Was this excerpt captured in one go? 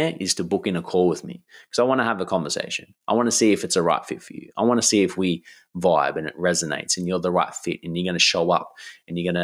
yes; 0 cuts

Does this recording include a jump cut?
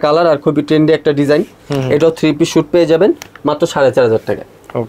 no; 0 cuts

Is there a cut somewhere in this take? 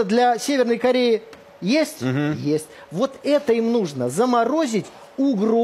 no; 0 cuts

